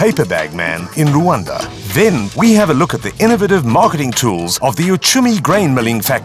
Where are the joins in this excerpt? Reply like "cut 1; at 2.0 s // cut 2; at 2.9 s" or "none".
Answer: cut 1; at 2.1 s